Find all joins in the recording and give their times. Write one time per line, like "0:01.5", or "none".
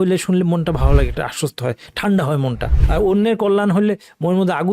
0:02.7